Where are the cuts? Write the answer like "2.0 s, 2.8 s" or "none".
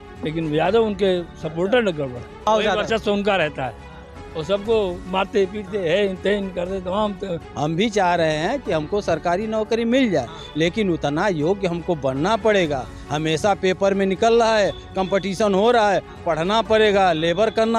2.5 s, 7.4 s